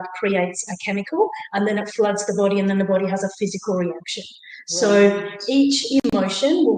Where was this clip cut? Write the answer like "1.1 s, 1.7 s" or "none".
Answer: none